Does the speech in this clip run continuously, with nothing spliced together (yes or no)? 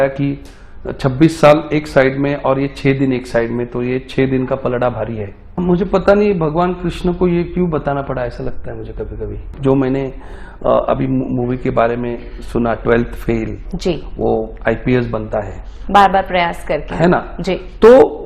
no